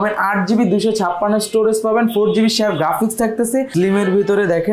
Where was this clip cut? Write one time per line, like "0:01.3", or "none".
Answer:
0:03.7